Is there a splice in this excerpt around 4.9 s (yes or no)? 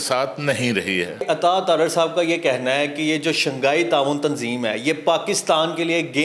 no